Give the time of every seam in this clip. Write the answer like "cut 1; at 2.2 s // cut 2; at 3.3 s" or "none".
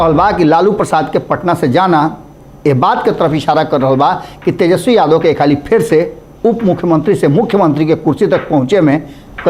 none